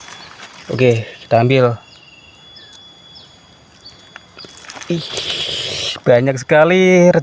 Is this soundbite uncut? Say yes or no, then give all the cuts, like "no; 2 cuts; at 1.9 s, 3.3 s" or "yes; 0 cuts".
yes; 0 cuts